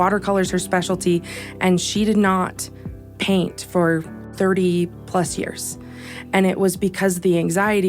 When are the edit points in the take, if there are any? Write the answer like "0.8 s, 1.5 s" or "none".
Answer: none

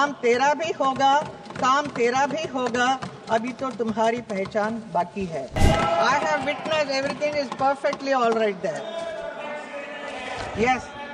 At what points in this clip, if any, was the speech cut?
5.6 s

